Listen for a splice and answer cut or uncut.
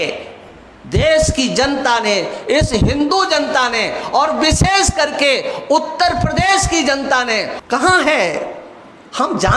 cut